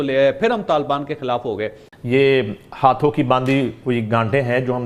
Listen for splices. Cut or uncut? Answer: uncut